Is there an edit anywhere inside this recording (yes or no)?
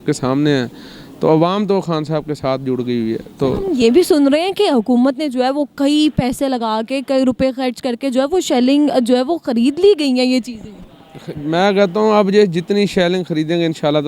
no